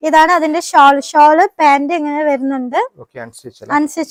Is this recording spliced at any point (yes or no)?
no